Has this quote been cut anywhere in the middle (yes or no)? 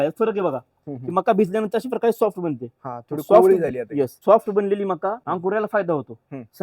yes